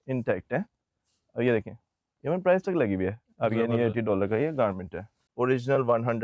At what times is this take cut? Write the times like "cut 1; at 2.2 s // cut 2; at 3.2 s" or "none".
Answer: cut 1; at 5.2 s